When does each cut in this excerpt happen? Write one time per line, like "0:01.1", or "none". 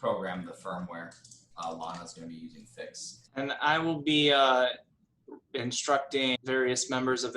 0:01.4
0:03.2
0:06.4